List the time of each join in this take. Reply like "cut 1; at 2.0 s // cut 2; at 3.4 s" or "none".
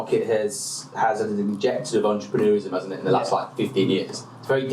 none